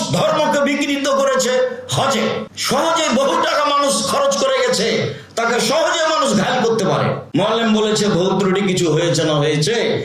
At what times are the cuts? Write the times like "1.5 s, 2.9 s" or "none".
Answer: 2.5 s, 7.2 s